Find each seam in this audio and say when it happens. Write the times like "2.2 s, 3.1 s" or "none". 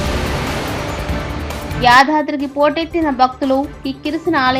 1.7 s